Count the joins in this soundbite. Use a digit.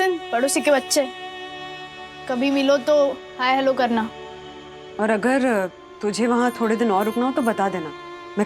0